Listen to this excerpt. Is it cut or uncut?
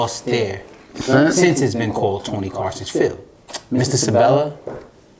cut